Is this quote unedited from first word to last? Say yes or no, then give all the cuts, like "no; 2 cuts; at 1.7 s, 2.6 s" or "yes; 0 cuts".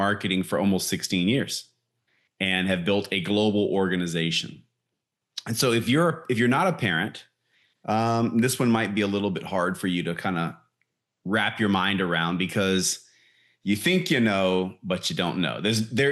yes; 0 cuts